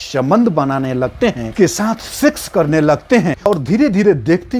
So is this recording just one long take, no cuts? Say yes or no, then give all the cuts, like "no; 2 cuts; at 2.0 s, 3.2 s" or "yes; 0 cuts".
no; 1 cut; at 3.4 s